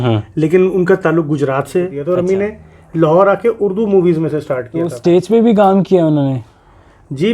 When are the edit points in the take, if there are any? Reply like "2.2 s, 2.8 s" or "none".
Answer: 2.0 s, 5.0 s